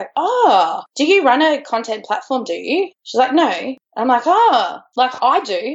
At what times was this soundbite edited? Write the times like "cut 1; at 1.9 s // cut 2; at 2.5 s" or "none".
cut 1; at 4.8 s